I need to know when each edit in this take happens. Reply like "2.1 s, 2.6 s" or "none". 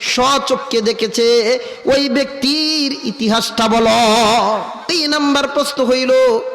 4.9 s